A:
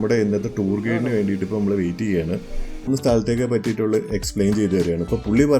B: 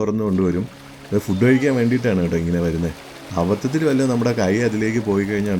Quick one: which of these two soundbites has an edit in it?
A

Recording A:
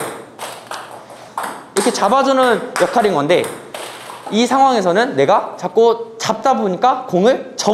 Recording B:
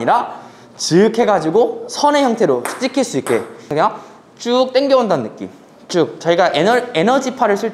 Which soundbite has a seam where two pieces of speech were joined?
B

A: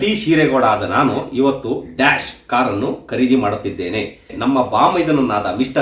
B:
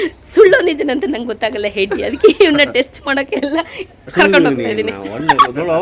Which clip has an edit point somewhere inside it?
A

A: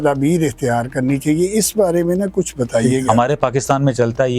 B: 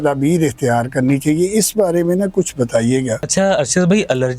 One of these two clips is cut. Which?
A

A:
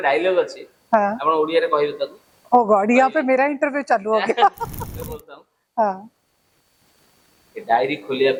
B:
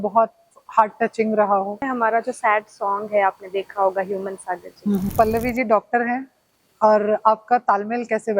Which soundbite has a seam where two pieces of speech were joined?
B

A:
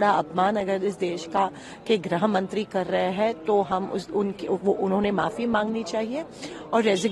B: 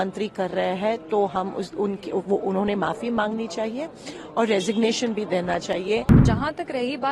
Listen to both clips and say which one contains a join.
B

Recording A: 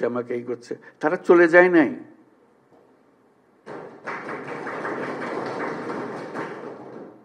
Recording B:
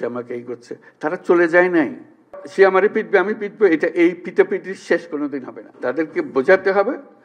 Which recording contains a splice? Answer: B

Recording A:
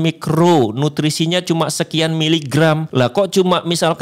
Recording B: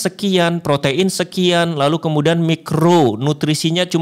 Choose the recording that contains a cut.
A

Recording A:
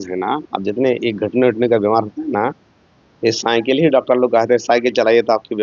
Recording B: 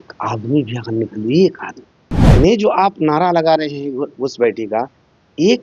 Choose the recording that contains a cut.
B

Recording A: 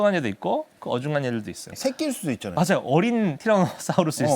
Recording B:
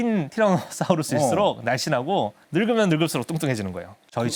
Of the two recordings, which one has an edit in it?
A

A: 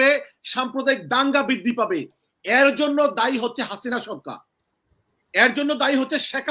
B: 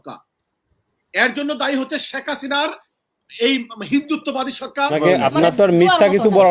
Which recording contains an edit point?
B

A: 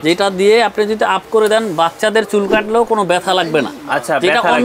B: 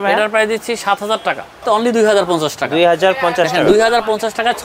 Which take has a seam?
B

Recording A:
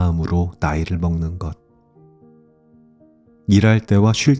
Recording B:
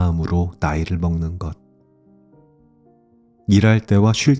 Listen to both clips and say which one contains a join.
B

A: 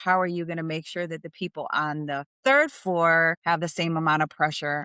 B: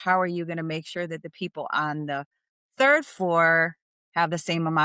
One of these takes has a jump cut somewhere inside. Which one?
A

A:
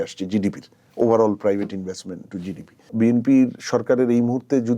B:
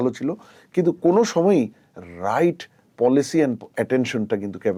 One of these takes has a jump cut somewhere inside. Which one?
A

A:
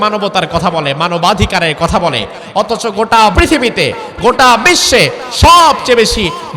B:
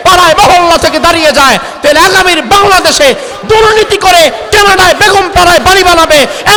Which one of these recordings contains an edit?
A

